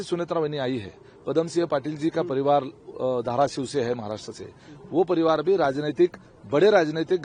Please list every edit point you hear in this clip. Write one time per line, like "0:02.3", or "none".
none